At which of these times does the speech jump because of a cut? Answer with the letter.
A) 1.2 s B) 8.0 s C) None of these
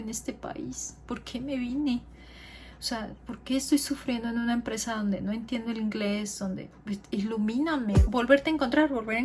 B